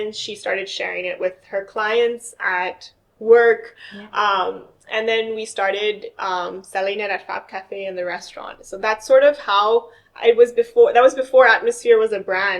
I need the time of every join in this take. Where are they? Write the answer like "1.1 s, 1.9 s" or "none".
none